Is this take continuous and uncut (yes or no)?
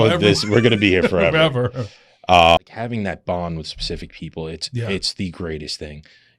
no